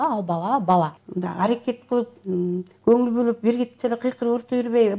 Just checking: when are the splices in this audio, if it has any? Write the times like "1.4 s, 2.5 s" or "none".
1.0 s